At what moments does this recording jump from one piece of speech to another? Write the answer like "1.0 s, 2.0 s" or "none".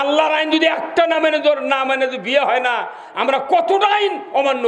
none